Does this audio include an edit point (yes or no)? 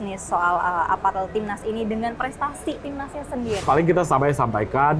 yes